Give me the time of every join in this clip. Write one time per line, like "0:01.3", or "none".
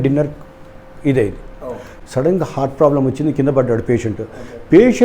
0:01.9